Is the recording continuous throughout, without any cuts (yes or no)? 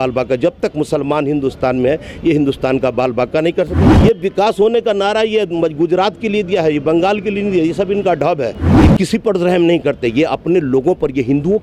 no